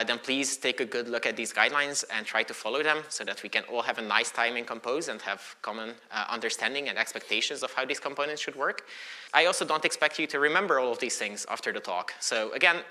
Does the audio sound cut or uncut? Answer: cut